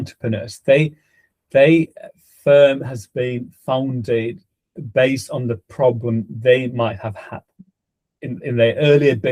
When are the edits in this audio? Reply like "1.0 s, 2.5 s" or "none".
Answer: none